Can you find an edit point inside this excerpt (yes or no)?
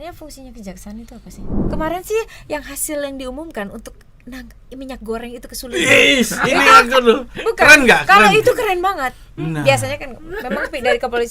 yes